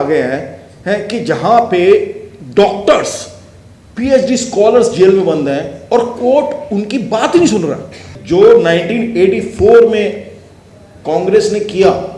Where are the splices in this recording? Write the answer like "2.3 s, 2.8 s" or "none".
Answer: 8.1 s